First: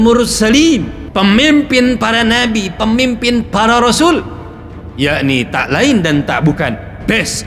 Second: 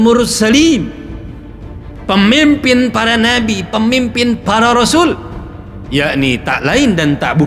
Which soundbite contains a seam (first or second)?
first